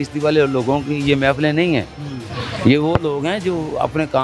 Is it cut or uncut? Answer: uncut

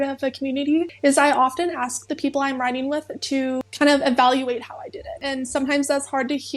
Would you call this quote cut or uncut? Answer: cut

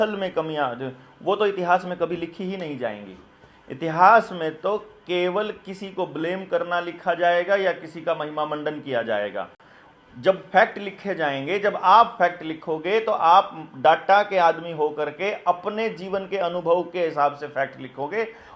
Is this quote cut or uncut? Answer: uncut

